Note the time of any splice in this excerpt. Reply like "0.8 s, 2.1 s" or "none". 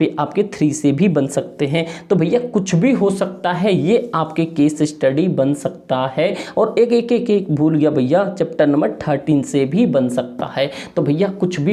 none